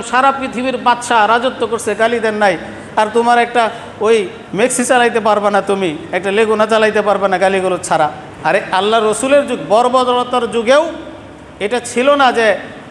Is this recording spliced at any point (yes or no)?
yes